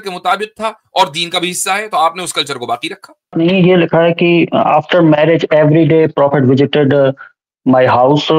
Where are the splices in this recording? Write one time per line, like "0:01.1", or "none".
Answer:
0:03.3